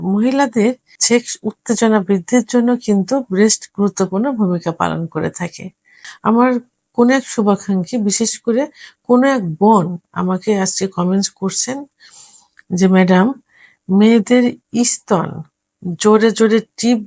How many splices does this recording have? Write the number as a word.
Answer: two